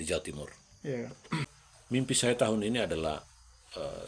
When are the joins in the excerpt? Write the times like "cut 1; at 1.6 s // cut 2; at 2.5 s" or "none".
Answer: cut 1; at 1.4 s